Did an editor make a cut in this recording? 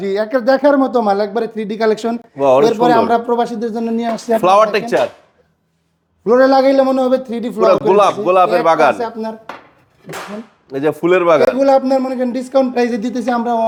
no; 0 cuts

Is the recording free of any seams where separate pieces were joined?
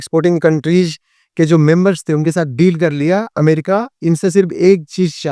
no; 1 cut; at 3.4 s

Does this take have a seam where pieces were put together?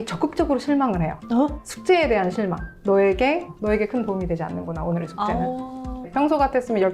yes; 3 cuts; at 1.6 s, 2.7 s, 6.1 s

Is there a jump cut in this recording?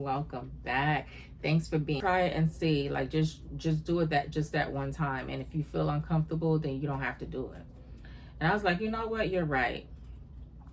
yes; 1 cut; at 2.0 s

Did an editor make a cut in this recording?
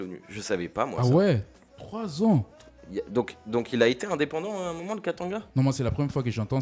yes; 1 cut; at 5.5 s

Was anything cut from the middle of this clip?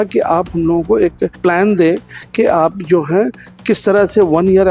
yes; 1 cut; at 1.3 s

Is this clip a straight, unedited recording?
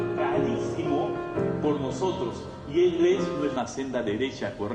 yes; 0 cuts

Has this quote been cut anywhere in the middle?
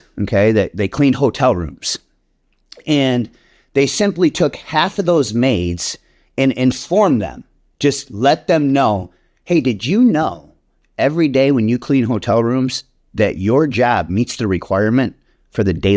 no; 0 cuts

